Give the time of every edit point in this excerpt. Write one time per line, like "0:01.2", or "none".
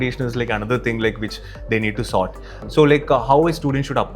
none